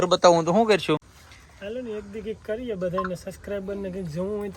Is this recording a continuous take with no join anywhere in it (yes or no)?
yes